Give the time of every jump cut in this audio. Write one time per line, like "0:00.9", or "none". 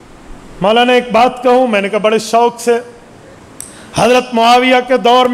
none